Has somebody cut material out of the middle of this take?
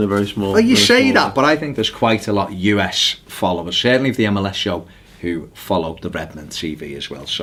no; 0 cuts

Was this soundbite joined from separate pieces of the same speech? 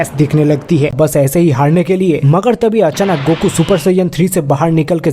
yes; 1 cut; at 0.9 s

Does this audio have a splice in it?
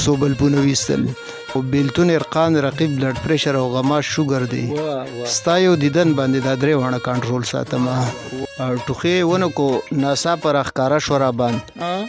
yes; 2 cuts; at 1.6 s, 8.4 s

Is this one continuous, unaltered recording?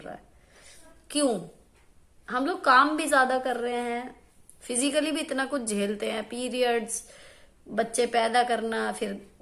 no; 1 cut; at 1.0 s

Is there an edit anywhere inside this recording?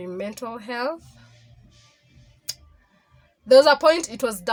no; 0 cuts

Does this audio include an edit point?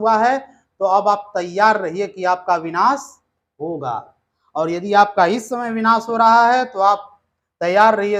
no; 0 cuts

